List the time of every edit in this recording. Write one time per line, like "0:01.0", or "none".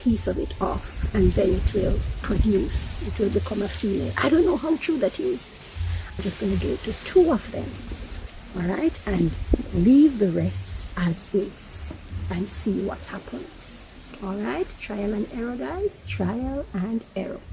0:06.2